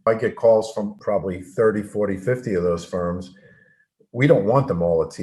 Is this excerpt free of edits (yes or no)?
no